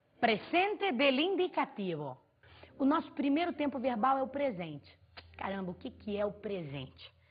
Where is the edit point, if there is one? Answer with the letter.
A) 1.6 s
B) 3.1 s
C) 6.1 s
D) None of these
C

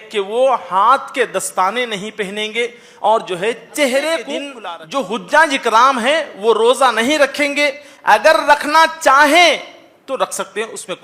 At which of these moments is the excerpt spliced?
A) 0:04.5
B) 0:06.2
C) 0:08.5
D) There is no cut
A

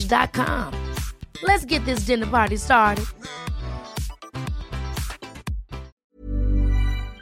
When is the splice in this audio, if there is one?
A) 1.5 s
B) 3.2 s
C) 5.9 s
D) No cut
C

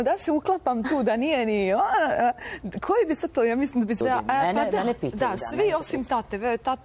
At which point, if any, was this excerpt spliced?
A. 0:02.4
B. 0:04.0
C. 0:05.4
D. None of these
B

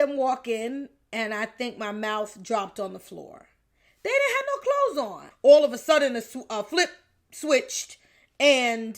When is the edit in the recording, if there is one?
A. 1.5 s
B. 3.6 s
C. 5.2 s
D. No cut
C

